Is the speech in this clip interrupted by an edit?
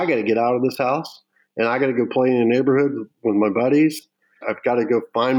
yes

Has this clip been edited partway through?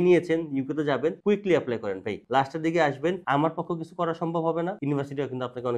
yes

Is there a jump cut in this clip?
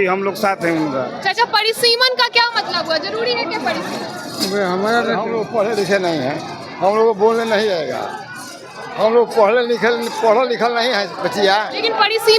no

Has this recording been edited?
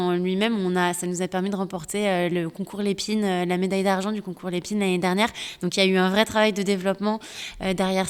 no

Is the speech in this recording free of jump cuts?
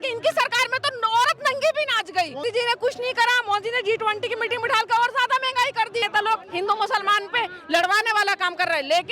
no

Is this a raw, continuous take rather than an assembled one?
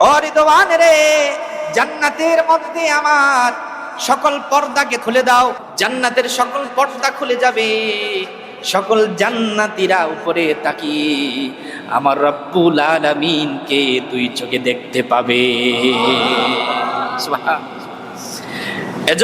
no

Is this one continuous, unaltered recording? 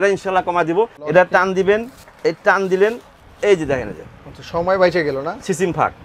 no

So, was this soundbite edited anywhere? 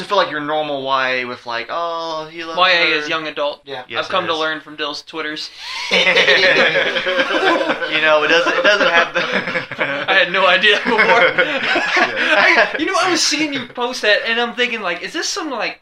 yes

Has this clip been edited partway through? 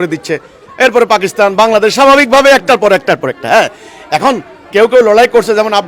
no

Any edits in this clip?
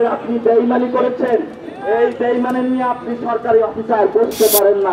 no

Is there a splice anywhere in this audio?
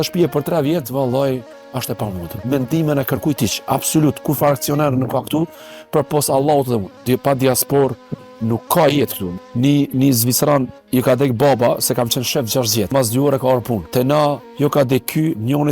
yes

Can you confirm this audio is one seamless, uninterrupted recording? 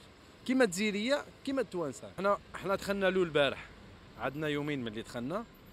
no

